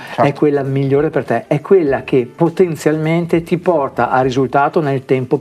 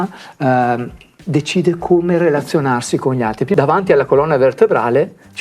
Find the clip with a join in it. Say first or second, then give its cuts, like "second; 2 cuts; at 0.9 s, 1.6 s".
second; 1 cut; at 3.5 s